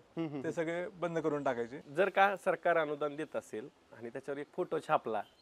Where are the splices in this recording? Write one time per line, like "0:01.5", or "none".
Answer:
0:01.8